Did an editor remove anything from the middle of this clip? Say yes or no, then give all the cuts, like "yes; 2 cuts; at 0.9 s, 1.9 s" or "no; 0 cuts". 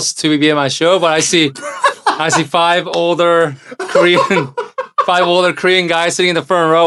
no; 0 cuts